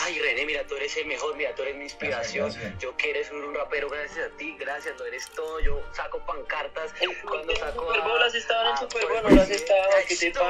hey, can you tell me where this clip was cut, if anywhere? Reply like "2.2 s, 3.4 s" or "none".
none